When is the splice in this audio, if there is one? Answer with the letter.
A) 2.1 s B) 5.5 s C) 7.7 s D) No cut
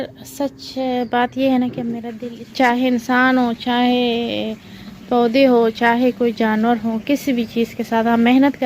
A